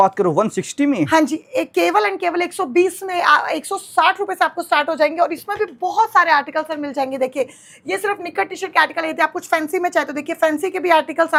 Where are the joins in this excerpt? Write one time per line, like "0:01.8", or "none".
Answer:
none